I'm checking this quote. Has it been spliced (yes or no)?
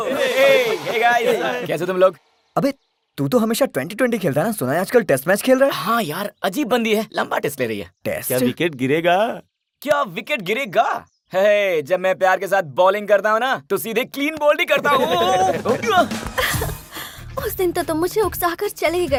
no